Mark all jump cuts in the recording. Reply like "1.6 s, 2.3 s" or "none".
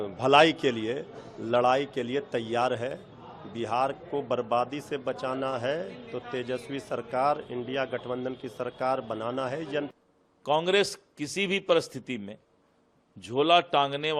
9.9 s